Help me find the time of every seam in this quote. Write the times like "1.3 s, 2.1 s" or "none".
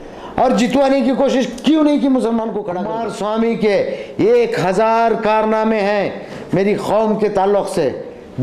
2.9 s